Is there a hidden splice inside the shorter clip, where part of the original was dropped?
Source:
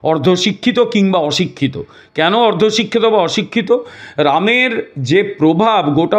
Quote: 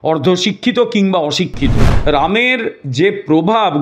yes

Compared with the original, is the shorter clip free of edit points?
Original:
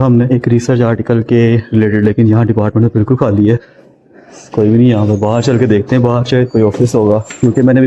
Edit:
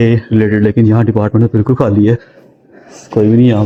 yes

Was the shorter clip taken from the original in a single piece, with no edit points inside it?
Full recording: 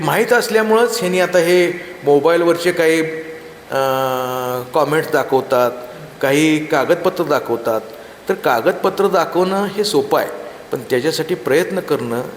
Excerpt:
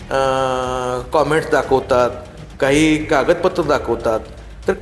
yes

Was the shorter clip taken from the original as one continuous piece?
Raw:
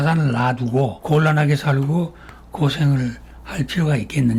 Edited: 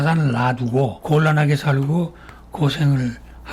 yes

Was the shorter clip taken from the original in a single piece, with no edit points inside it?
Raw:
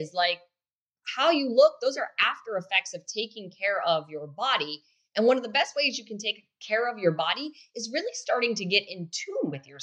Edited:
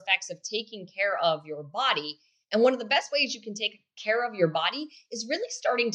yes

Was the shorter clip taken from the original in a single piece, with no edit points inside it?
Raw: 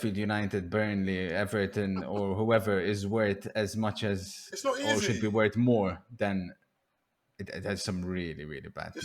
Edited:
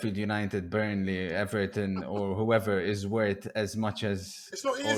yes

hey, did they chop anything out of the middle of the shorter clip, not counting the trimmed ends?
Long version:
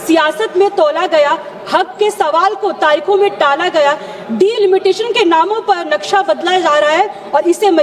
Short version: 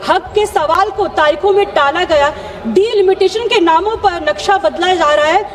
no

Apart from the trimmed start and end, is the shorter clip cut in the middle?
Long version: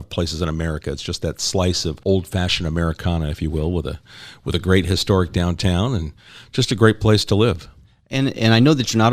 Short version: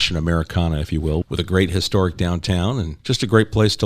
yes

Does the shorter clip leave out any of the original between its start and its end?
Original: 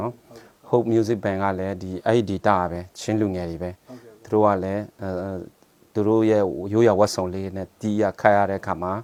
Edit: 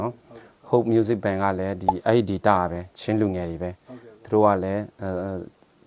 no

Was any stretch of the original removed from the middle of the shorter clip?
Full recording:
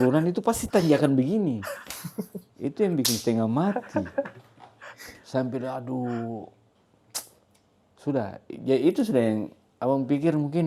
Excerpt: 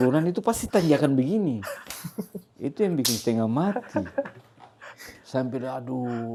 no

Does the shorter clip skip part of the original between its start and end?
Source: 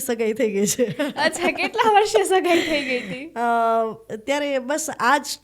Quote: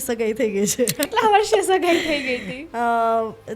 yes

